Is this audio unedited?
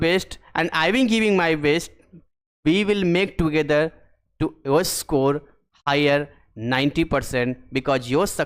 yes; 0 cuts

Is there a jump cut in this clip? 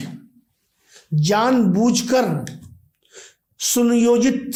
no; 0 cuts

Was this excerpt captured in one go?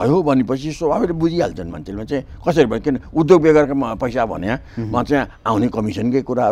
yes; 0 cuts

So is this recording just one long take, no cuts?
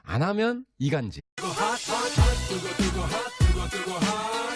yes; 0 cuts

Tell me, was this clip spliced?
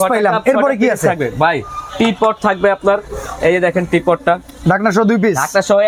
no; 0 cuts

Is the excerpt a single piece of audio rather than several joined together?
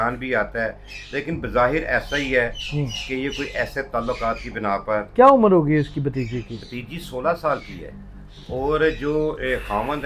yes; 0 cuts

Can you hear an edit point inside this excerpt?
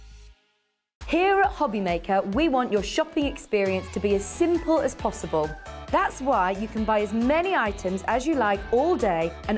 yes; 1 cut; at 0.9 s

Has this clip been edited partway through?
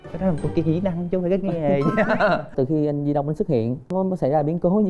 yes; 2 cuts; at 2.5 s, 3.9 s

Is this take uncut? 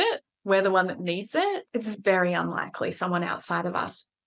no; 1 cut; at 1.7 s

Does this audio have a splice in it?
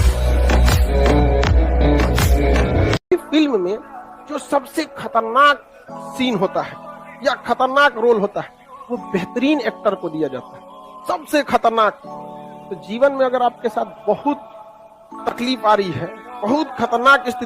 yes; 1 cut; at 3.1 s

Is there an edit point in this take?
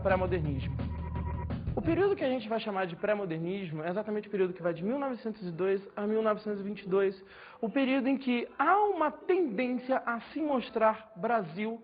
yes; 1 cut; at 6.3 s

